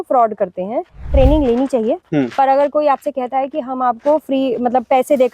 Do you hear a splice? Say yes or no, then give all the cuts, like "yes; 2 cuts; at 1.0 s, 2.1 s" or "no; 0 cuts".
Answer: yes; 1 cut; at 1.1 s